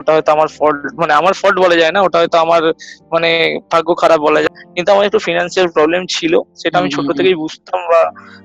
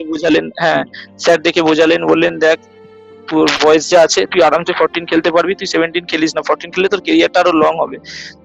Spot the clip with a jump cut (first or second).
first